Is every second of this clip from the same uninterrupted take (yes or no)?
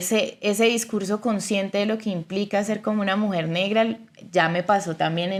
yes